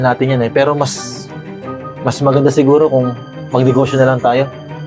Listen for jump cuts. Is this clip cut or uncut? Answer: uncut